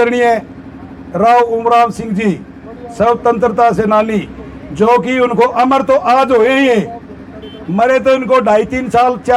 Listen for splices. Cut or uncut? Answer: uncut